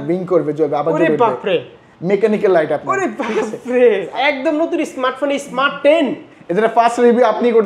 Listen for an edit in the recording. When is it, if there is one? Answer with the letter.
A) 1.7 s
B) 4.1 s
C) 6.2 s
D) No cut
B